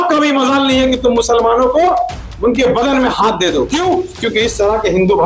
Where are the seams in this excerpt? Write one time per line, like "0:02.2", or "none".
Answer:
none